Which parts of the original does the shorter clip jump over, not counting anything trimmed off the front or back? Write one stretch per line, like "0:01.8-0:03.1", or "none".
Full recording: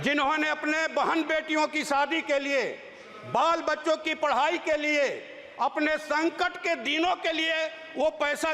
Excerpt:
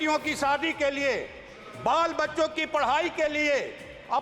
none

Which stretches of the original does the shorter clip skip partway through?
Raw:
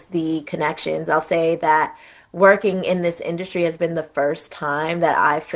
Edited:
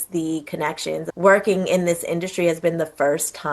0:01.0-0:02.2

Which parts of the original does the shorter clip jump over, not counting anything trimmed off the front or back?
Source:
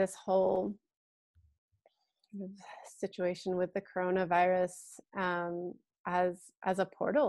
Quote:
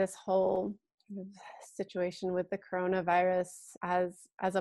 0:00.9-0:02.2
0:04.9-0:05.9

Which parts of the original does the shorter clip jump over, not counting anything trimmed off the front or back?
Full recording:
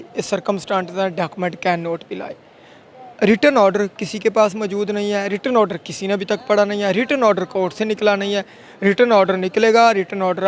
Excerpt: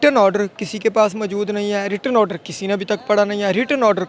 none

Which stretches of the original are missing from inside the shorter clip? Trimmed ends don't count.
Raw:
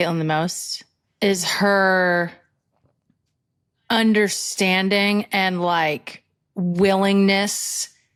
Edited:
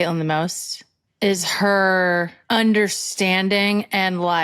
0:02.4-0:03.8

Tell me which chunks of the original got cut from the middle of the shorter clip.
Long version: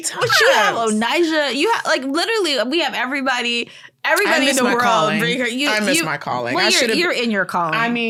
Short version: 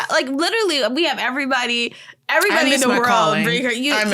none

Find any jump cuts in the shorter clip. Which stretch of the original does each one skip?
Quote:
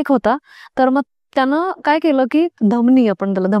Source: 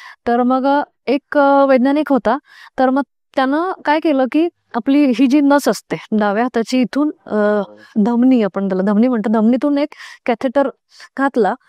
0:04.5-0:07.9

